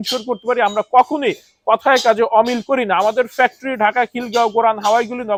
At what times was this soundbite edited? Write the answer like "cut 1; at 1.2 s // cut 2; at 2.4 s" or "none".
none

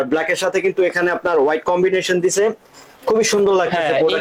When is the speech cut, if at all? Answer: none

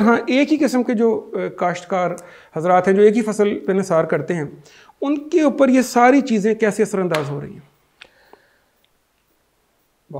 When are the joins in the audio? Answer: none

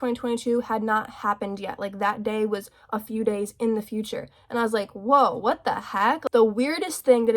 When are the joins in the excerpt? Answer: cut 1; at 6.1 s

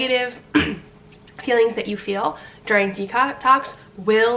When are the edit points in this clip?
none

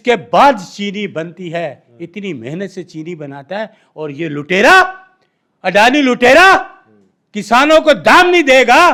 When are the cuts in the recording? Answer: none

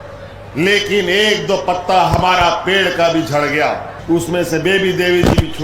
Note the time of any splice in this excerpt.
cut 1; at 3.9 s

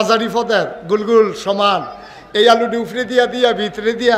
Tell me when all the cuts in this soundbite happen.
none

